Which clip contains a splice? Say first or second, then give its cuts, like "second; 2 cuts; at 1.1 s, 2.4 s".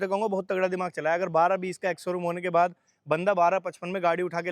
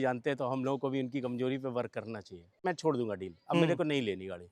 second; 1 cut; at 2.6 s